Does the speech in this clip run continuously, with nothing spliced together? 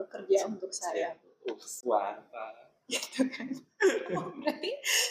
yes; 0 cuts

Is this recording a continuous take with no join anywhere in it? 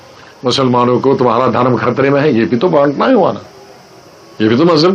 yes; 0 cuts

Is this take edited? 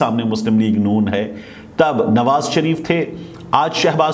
no; 0 cuts

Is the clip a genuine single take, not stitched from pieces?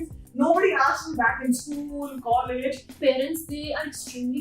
no; 1 cut; at 3.0 s

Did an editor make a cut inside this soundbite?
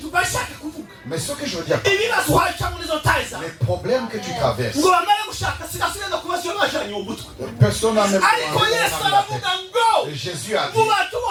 no; 0 cuts

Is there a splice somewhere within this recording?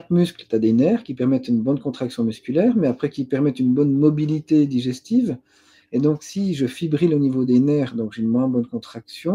no; 0 cuts

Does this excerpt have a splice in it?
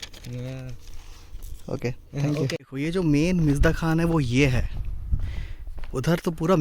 yes; 1 cut; at 2.7 s

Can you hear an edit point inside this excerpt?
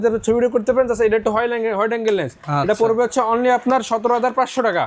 no; 0 cuts

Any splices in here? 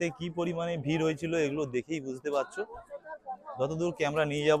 no; 0 cuts

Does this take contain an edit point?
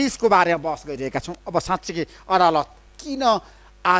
no; 0 cuts

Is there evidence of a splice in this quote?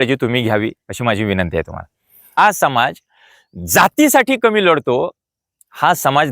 yes; 1 cut; at 2.4 s

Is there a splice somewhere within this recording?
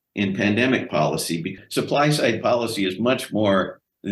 yes; 1 cut; at 1.5 s

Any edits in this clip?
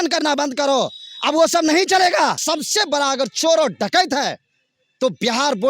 yes; 1 cut; at 2.4 s

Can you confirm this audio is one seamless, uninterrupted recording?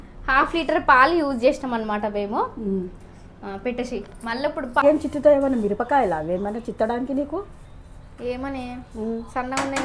no; 1 cut; at 4.8 s

